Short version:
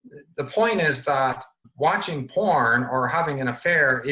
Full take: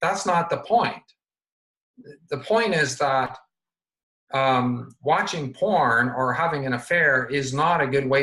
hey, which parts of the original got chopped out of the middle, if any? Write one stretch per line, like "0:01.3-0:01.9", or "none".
0:03.6-0:04.9